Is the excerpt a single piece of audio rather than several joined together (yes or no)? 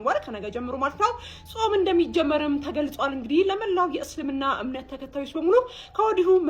yes